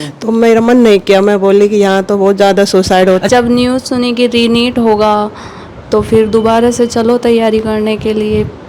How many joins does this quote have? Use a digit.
1